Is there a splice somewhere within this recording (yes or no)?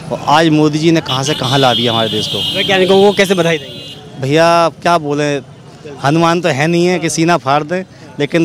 no